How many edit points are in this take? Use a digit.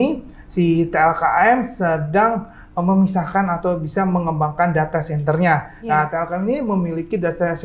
0